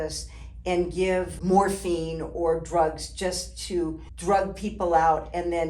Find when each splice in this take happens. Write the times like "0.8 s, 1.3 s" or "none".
1.3 s, 4.1 s